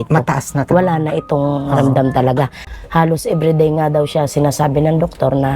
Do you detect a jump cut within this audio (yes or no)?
yes